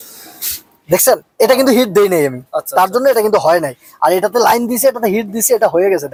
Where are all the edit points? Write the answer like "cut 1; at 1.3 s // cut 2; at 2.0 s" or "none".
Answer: none

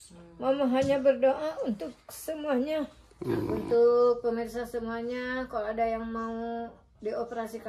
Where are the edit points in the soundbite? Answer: cut 1; at 3.5 s

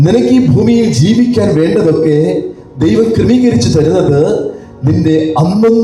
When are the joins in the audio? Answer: none

